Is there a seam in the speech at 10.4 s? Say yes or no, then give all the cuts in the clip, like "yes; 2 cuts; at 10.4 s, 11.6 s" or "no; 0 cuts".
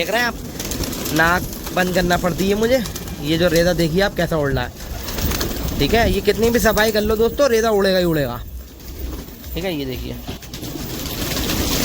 yes; 1 cut; at 10.4 s